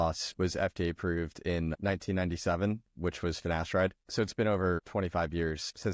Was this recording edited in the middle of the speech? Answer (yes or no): no